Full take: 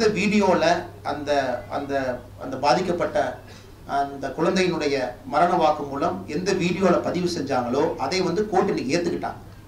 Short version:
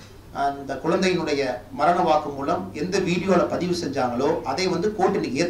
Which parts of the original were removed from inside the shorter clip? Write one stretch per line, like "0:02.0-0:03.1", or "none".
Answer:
none